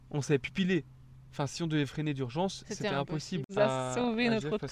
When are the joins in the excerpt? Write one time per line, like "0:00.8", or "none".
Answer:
0:03.5